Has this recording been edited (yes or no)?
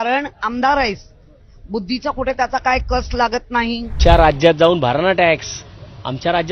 yes